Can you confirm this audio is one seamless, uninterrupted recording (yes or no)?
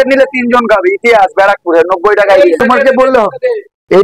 no